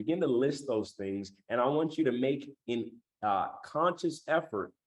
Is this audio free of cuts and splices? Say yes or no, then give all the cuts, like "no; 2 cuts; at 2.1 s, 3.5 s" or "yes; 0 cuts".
yes; 0 cuts